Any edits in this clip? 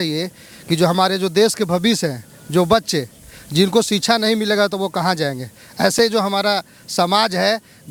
no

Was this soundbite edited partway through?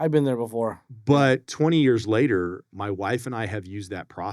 yes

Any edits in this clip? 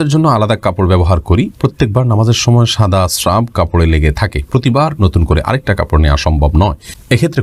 no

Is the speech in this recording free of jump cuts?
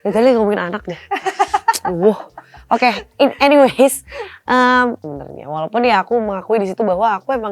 no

